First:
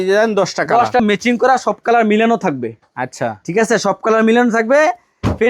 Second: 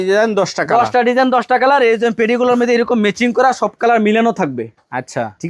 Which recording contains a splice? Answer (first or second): first